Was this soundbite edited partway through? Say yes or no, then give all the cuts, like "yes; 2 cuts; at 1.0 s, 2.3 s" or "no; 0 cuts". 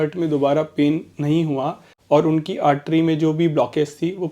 yes; 1 cut; at 1.9 s